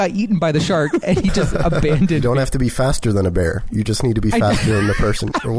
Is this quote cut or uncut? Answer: cut